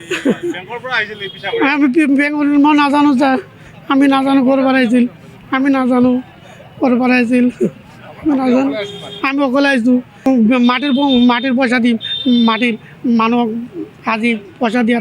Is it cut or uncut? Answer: cut